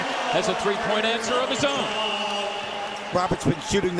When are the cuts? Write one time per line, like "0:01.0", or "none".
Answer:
none